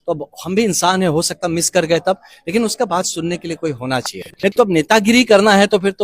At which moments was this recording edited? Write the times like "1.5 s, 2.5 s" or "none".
4.6 s